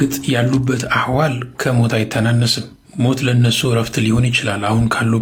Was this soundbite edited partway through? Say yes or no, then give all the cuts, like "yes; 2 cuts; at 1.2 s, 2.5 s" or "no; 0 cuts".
no; 0 cuts